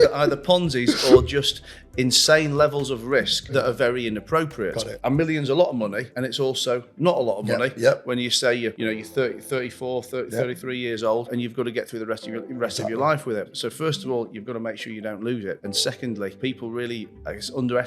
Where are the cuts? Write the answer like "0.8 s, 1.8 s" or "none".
3.5 s, 4.9 s, 6.1 s, 8.8 s, 11.3 s, 13.5 s, 16.1 s